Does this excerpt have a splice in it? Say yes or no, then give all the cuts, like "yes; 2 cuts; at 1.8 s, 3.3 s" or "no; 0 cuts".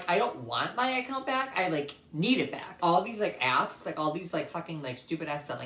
yes; 1 cut; at 2.8 s